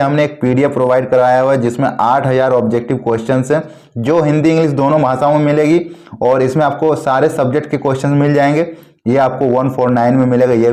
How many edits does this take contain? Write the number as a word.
zero